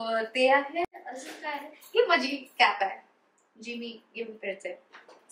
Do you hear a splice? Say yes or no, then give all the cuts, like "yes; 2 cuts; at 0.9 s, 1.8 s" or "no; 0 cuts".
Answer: no; 0 cuts